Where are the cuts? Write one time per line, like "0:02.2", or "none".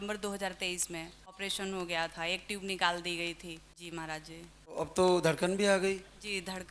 0:01.4
0:03.7
0:04.8